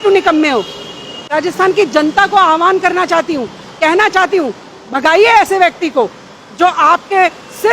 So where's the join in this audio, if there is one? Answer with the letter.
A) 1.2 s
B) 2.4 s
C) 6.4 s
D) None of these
A